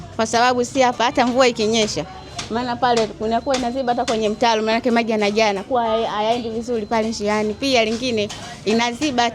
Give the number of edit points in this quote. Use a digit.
0